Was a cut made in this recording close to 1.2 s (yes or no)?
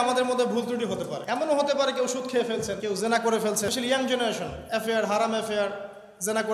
yes